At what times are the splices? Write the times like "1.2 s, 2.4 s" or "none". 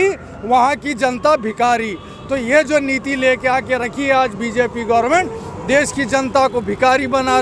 none